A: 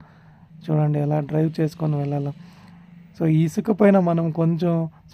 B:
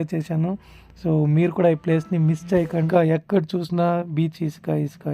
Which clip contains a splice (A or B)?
B